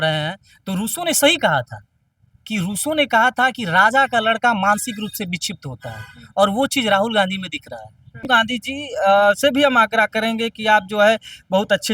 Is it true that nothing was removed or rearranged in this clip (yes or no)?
no